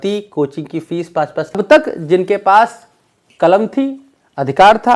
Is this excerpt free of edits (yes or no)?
no